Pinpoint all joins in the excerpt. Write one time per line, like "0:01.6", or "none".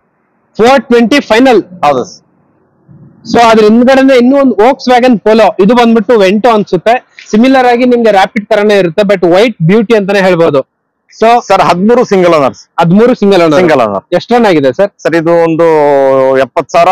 none